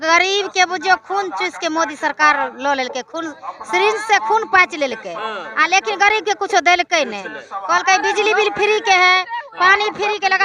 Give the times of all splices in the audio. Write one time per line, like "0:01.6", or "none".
none